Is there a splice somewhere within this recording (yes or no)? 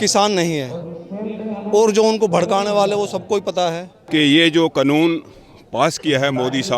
yes